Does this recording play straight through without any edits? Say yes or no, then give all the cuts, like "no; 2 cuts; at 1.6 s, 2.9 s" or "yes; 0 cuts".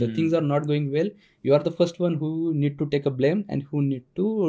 yes; 0 cuts